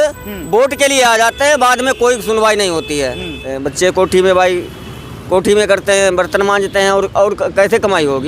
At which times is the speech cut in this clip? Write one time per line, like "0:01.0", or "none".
0:03.5